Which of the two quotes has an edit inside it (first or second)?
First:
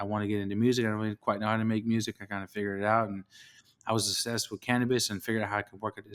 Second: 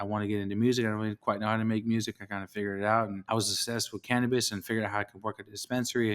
second